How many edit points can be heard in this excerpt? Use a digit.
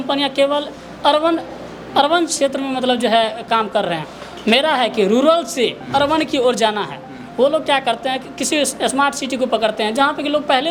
0